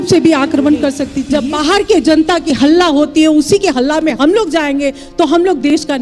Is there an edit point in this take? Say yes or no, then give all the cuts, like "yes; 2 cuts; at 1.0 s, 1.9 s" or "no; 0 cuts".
yes; 1 cut; at 1.1 s